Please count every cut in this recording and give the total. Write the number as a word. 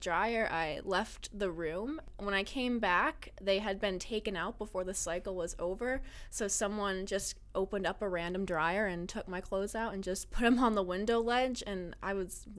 one